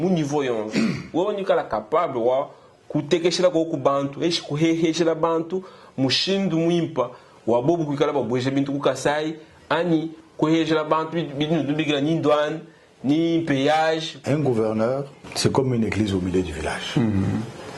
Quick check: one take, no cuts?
no; 1 cut; at 15.2 s

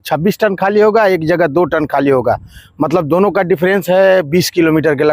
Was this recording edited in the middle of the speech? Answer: no; 0 cuts

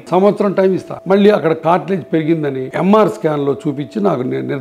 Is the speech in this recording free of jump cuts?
no; 2 cuts; at 0.9 s, 2.6 s

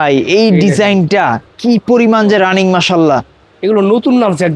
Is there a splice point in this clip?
no; 0 cuts

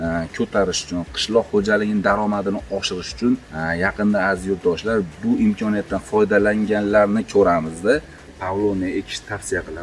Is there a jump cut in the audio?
yes; 2 cuts; at 3.5 s, 8.2 s

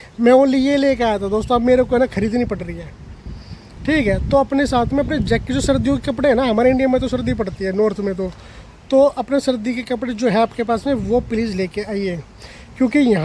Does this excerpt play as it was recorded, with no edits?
yes; 0 cuts

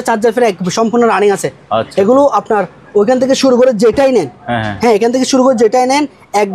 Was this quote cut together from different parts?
no; 0 cuts

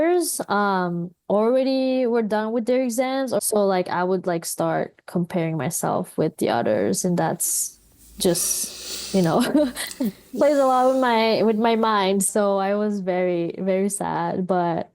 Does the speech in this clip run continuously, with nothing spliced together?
no; 3 cuts; at 3.4 s, 10.2 s, 12.3 s

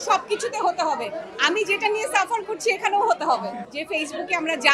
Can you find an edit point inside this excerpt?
yes; 1 cut; at 3.6 s

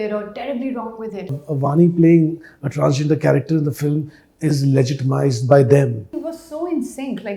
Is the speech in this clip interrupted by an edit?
yes; 2 cuts; at 1.4 s, 6.3 s

